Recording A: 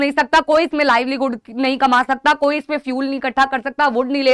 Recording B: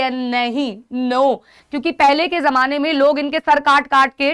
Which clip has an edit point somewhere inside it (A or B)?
B